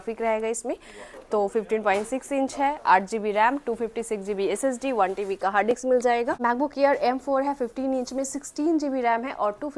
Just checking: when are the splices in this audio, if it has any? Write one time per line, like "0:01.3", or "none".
0:06.4